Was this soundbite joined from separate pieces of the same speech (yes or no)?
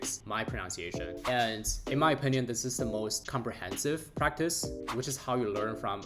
yes